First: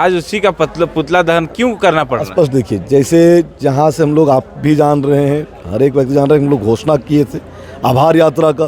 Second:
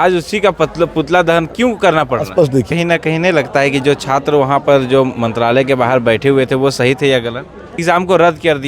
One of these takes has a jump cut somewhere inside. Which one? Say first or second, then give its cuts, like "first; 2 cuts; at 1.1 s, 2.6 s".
second; 2 cuts; at 2.7 s, 7.8 s